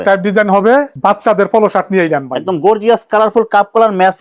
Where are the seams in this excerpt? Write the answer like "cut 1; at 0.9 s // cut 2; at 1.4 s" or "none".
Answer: cut 1; at 0.9 s